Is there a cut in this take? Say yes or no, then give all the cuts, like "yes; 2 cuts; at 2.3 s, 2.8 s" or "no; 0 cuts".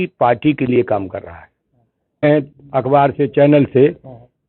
yes; 1 cut; at 2.2 s